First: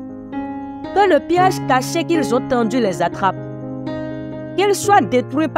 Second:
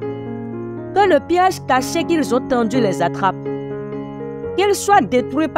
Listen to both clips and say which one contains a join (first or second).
second